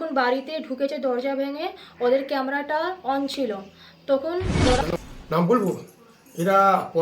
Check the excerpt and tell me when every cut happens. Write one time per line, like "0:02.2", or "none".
0:04.8

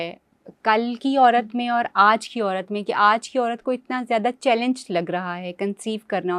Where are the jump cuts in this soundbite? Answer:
none

